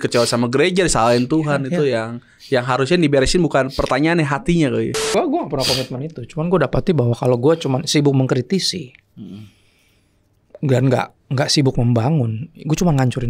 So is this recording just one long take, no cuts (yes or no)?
no